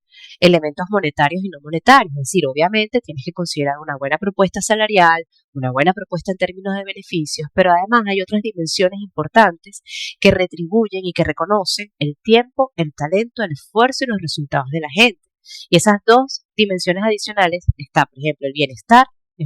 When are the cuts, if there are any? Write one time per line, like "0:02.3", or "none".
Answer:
none